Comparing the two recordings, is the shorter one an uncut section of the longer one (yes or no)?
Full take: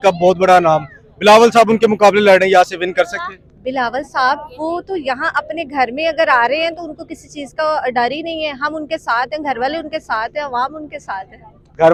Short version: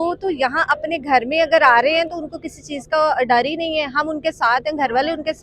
yes